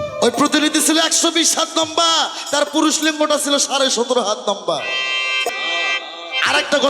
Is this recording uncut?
no; 1 cut; at 5.6 s

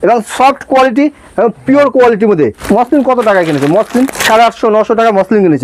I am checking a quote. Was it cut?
yes; 2 cuts; at 2.6 s, 4.2 s

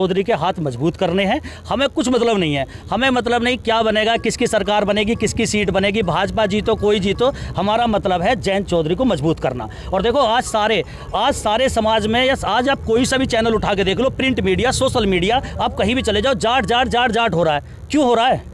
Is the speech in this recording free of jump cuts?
yes; 0 cuts

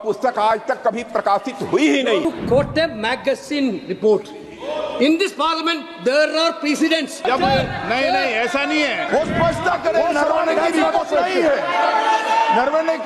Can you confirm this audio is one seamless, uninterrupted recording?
no; 3 cuts; at 2.2 s, 7.2 s, 9.1 s

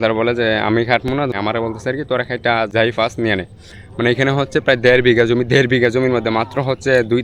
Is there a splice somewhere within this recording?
yes; 2 cuts; at 1.3 s, 2.7 s

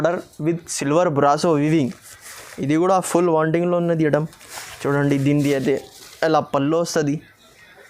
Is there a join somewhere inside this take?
no; 0 cuts

